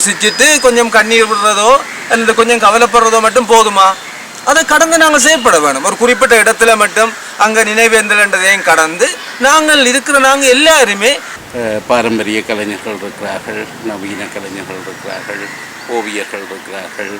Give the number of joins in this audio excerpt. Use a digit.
1